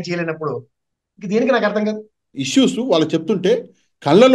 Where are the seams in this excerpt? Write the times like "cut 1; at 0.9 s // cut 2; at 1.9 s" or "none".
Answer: cut 1; at 2.4 s